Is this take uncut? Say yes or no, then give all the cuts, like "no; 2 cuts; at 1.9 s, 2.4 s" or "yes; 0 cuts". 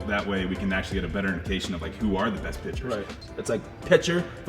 no; 1 cut; at 3.2 s